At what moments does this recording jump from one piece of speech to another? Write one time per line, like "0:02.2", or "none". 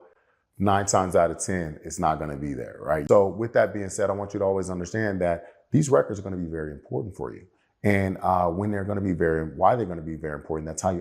0:03.0